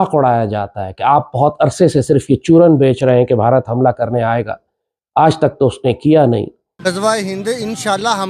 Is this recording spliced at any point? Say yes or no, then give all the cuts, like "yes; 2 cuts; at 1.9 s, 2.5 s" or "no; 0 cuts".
yes; 1 cut; at 6.6 s